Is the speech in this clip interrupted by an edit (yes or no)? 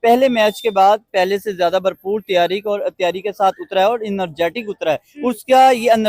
no